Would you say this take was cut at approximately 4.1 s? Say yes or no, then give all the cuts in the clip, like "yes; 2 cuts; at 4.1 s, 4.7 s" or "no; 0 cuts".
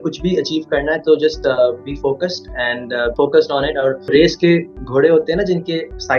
yes; 2 cuts; at 3.1 s, 4.1 s